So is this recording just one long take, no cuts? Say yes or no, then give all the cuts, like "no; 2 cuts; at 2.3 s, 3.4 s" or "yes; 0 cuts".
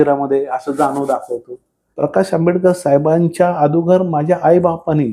no; 1 cut; at 1.8 s